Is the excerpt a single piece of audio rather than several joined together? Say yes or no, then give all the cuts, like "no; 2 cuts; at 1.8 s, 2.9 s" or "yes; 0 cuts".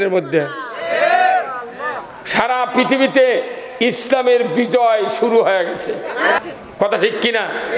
no; 1 cut; at 6.4 s